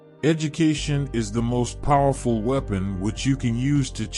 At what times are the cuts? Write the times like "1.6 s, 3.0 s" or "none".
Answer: none